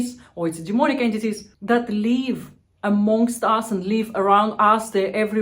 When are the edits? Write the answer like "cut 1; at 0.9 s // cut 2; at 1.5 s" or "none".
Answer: cut 1; at 1.5 s